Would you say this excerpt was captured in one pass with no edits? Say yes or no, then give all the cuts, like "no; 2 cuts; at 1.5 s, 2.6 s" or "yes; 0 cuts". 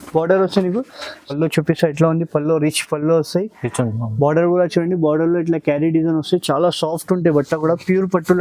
no; 1 cut; at 1.2 s